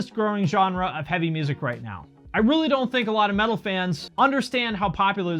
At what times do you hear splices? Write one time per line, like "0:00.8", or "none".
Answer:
0:04.0

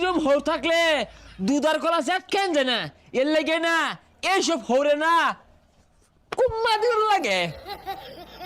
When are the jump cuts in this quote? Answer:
0:07.5

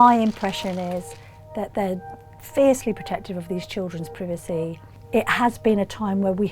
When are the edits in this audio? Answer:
0:04.8

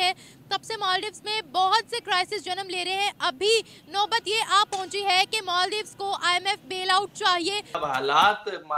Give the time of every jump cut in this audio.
0:07.7

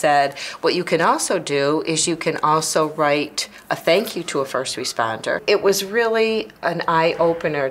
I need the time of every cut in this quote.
0:05.4

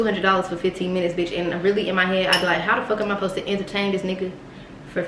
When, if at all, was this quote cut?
none

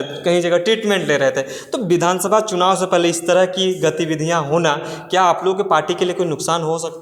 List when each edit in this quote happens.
none

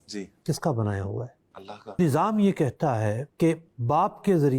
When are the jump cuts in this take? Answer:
0:02.0

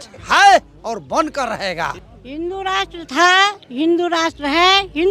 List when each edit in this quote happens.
0:02.0

